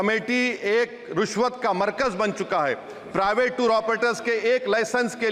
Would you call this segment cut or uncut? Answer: uncut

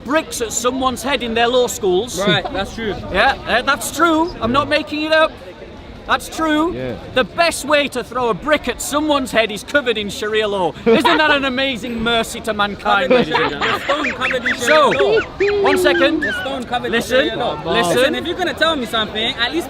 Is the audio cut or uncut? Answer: uncut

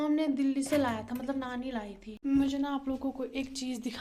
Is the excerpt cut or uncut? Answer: cut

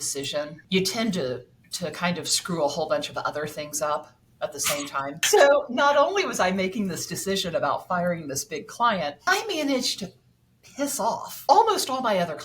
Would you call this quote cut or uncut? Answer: cut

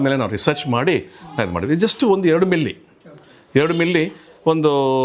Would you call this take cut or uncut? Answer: uncut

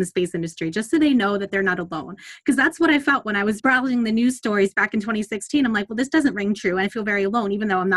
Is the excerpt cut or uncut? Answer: cut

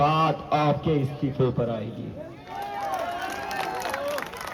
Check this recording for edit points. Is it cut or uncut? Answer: uncut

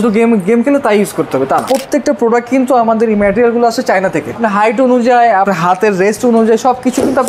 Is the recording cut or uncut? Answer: cut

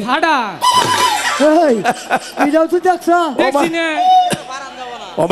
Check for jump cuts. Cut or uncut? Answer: uncut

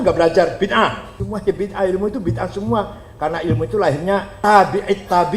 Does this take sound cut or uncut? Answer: cut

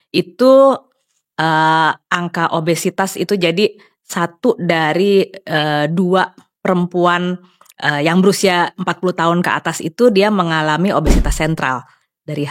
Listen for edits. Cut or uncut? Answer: uncut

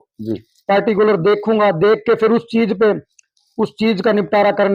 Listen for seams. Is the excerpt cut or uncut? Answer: uncut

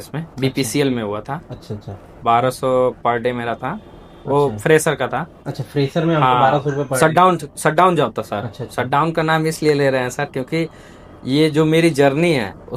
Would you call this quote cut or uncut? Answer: uncut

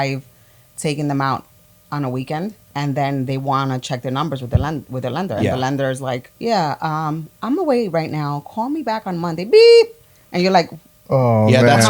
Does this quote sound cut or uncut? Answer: cut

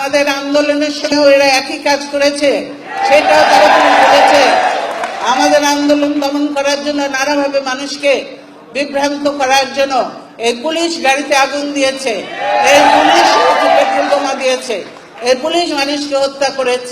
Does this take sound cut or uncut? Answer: cut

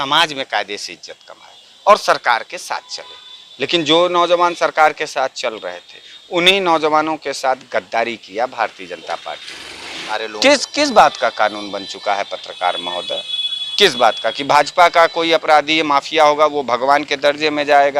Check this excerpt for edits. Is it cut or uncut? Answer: cut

